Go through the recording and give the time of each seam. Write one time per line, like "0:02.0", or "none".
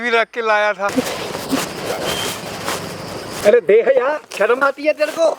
0:00.9
0:03.4
0:04.3